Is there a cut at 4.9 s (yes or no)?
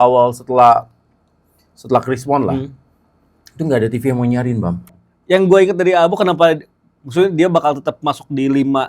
yes